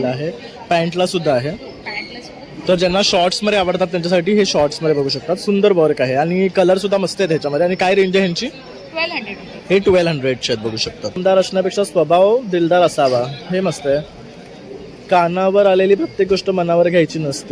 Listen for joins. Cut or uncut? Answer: cut